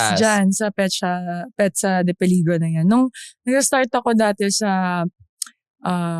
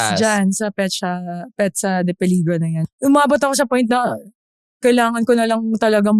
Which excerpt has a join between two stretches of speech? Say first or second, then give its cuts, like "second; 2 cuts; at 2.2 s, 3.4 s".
second; 1 cut; at 2.8 s